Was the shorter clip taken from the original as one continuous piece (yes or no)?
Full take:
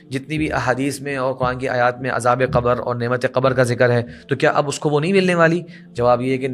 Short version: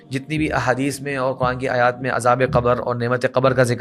yes